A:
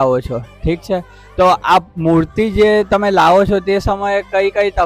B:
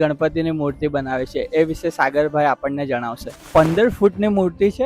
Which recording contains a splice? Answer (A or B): B